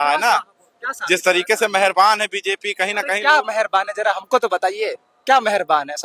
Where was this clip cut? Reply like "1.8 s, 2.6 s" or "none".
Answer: none